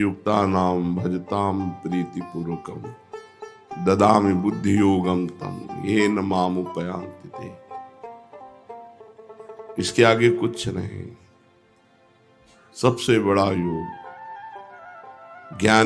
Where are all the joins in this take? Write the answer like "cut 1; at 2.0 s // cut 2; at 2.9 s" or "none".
none